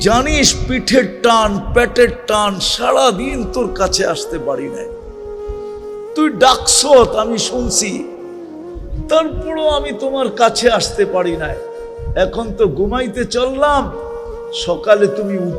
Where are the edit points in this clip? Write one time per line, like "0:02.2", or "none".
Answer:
0:04.7
0:06.1